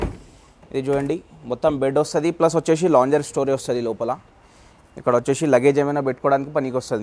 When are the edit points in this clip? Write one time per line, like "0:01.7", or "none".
none